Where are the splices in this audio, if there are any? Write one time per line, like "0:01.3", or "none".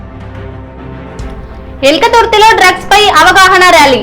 none

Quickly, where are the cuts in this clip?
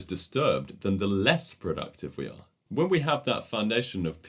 0:02.6

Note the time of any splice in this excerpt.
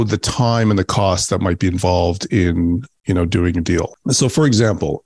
0:03.9

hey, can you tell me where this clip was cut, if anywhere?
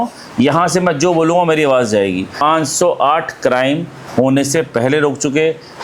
0:02.4

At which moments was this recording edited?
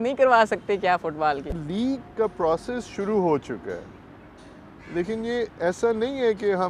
0:01.6

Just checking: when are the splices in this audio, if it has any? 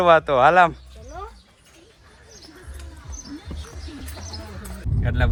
none

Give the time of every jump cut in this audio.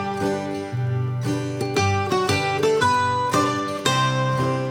none

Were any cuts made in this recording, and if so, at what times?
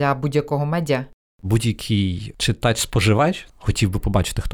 0:01.4
0:02.3
0:03.5

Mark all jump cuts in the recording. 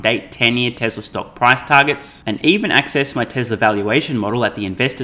none

